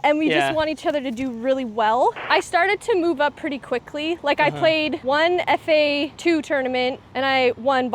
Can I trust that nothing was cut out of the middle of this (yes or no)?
no